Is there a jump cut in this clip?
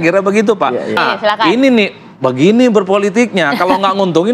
yes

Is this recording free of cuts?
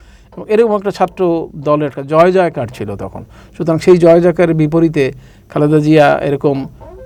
yes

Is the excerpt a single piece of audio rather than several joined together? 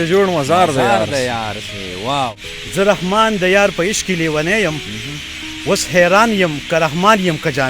no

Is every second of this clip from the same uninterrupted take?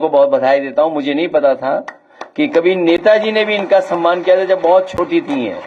yes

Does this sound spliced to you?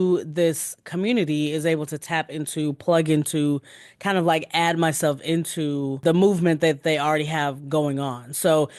yes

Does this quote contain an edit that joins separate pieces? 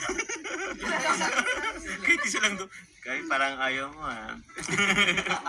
no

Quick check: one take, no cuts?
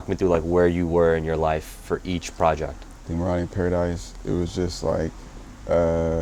yes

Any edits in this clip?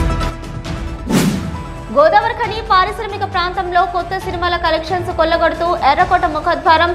no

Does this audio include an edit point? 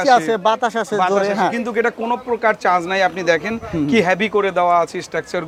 no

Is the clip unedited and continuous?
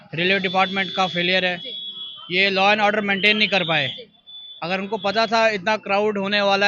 yes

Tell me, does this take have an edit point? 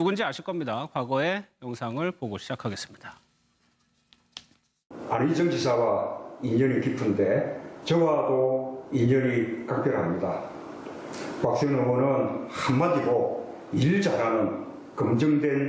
no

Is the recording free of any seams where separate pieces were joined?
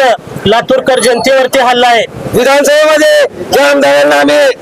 no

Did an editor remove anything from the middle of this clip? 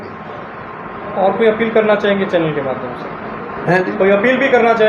no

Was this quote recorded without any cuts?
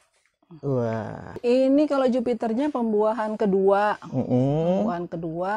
no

